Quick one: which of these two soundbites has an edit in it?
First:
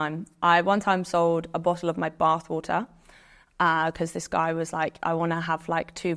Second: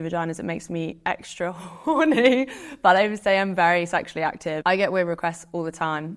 second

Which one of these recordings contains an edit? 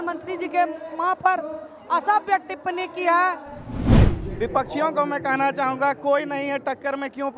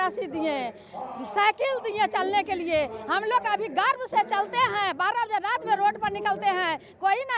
first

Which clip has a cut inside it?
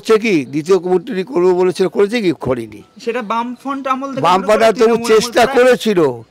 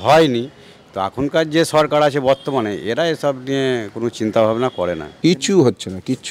second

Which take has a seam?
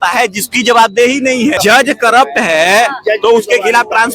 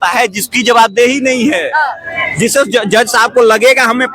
first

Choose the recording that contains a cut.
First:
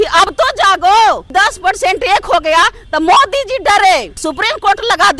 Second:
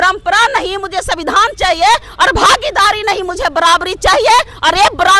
first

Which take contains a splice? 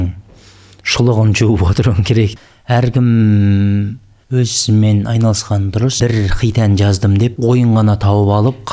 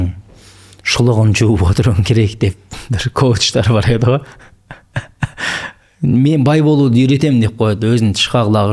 first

